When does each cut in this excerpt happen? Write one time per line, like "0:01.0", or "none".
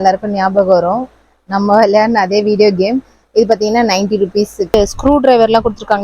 0:04.7